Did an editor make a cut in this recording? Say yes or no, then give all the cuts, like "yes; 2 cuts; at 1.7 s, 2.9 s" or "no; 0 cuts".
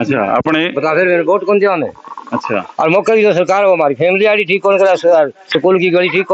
no; 0 cuts